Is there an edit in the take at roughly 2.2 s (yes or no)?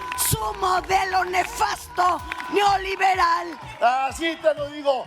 no